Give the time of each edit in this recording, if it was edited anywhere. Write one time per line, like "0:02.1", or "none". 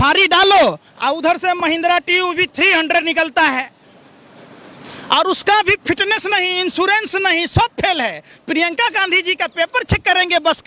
none